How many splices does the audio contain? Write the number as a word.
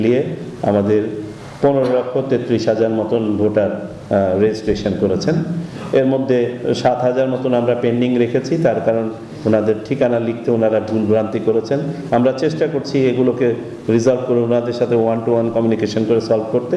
zero